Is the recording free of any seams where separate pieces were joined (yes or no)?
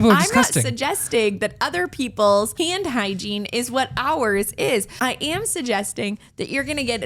no